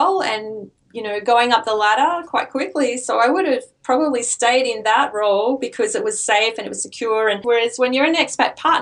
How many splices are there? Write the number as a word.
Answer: one